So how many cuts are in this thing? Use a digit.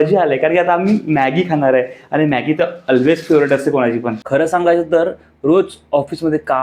1